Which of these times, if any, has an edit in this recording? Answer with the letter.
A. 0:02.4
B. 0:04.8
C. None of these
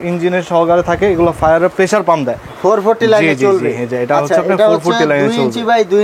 A